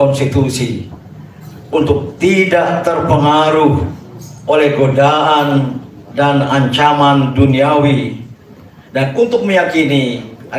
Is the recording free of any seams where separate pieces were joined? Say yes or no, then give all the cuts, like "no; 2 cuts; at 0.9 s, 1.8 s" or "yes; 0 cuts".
yes; 0 cuts